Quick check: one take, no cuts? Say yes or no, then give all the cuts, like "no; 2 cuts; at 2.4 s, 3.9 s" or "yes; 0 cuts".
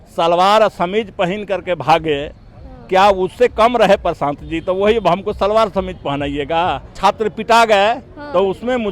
no; 1 cut; at 6.9 s